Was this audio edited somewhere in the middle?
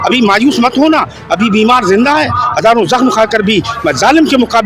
no; 0 cuts

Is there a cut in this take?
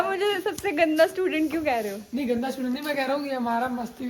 no; 0 cuts

